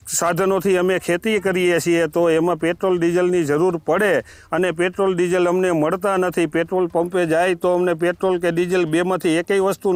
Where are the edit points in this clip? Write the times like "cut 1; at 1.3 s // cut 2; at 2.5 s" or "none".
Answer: none